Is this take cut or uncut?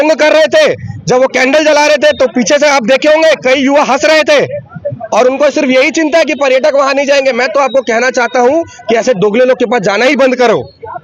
uncut